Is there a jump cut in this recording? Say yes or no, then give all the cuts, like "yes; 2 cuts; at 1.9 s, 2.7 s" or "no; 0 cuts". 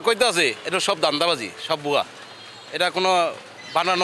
no; 0 cuts